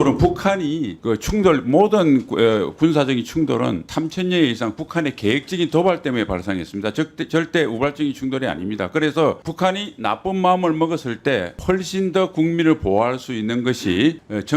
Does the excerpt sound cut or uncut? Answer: cut